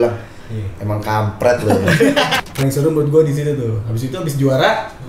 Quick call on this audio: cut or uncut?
cut